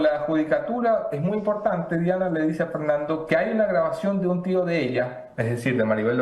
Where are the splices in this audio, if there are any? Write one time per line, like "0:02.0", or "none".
none